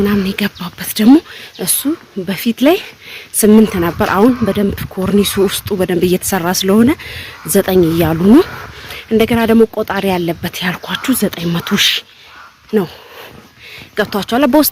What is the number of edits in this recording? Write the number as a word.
zero